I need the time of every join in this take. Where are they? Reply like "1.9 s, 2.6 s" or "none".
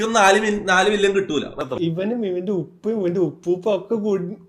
1.6 s

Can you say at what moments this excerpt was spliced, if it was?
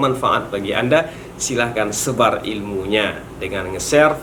none

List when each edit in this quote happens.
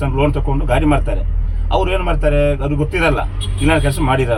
none

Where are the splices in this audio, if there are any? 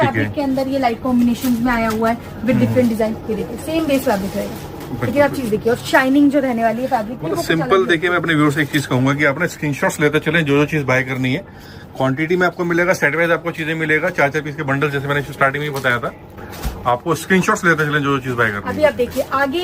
none

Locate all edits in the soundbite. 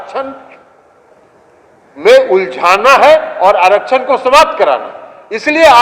none

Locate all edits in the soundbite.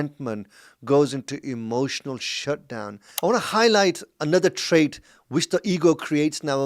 3.2 s

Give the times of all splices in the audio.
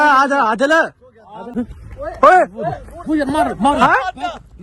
1.4 s

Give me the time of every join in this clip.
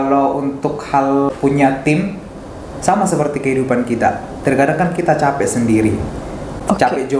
1.3 s

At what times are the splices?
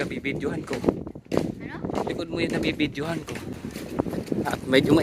3.5 s

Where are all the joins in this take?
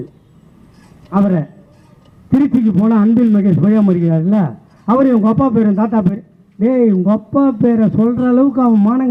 none

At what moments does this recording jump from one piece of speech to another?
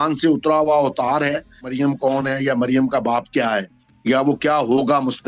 1.7 s

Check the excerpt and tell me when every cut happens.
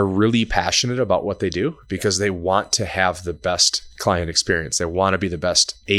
none

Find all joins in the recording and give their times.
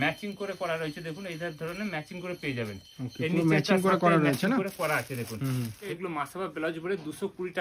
5.9 s

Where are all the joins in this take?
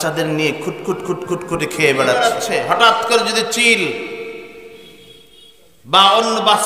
2.4 s

